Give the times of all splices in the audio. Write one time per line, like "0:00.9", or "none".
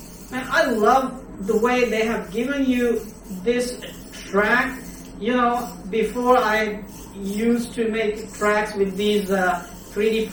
none